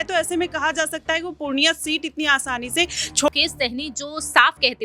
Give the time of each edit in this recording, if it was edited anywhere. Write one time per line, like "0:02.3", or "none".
0:03.3